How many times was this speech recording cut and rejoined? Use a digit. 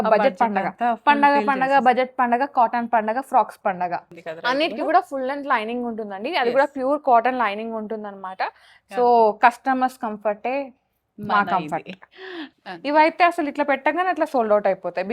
2